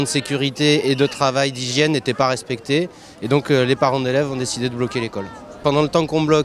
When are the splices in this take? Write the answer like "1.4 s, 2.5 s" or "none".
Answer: none